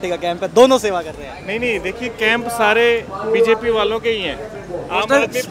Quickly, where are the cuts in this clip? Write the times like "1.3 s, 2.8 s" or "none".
none